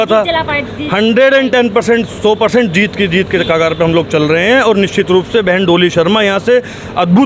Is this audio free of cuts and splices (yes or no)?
yes